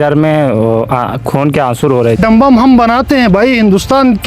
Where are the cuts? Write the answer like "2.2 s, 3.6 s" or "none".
2.2 s